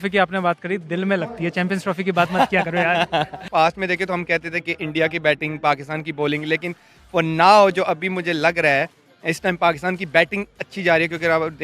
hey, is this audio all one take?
no; 1 cut; at 3.4 s

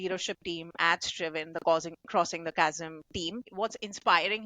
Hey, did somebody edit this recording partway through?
yes; 1 cut; at 3.5 s

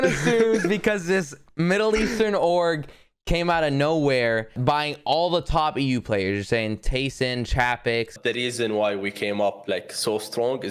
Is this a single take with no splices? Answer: no; 2 cuts; at 4.6 s, 8.1 s

